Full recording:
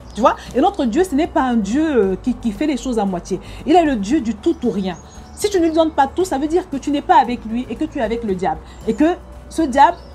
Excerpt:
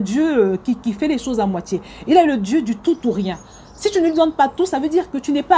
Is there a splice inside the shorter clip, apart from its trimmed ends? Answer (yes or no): no